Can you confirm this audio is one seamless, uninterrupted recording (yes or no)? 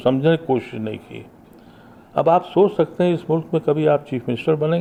yes